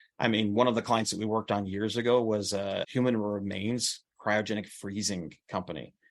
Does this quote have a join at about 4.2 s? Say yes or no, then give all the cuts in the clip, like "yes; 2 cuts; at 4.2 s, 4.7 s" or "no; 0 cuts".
no; 1 cut; at 2.9 s